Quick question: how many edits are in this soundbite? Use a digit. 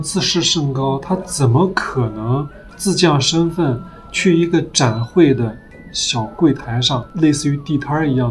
0